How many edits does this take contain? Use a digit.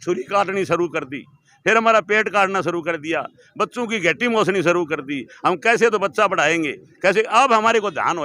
0